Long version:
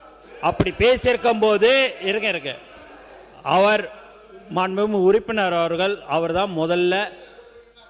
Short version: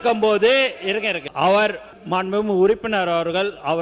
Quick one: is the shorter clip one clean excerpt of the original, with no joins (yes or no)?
no